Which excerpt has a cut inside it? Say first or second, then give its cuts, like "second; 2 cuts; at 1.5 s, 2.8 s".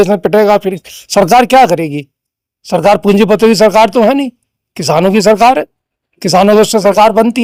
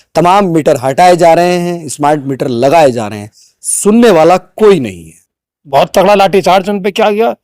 second; 1 cut; at 5.6 s